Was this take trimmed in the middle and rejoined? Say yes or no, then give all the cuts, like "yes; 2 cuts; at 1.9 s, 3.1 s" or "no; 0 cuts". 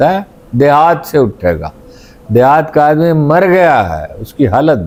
no; 0 cuts